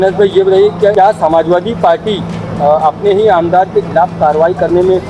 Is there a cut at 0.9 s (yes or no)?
yes